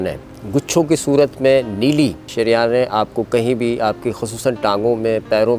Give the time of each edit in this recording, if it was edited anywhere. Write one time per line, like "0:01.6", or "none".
0:02.2